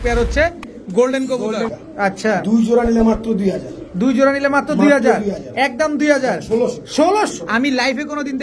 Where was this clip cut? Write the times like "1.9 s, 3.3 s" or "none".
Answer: 1.8 s, 7.3 s

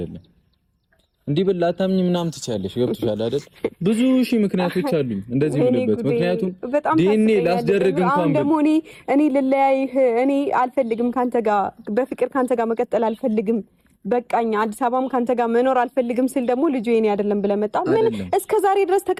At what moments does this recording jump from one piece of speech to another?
none

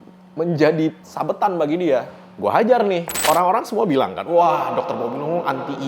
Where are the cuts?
3.1 s

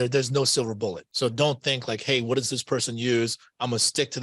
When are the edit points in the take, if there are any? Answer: 1.0 s

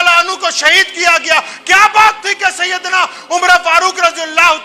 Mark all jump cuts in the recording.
none

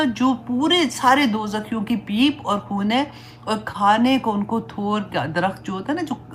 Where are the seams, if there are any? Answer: none

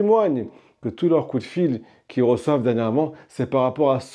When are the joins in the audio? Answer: none

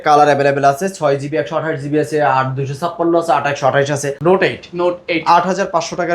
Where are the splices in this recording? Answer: 4.1 s

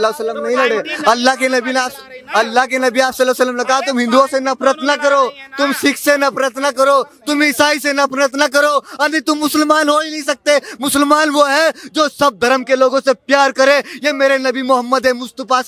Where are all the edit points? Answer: none

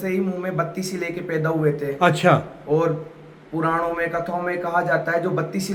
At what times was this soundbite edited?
none

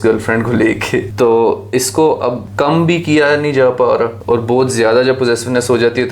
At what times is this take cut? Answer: 1.1 s, 2.4 s, 4.2 s

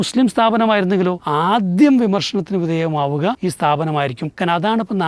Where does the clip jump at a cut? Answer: 1.2 s, 3.4 s, 4.3 s

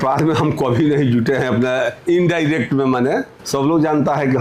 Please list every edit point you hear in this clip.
3.4 s

